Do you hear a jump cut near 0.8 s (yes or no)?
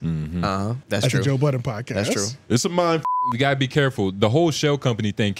yes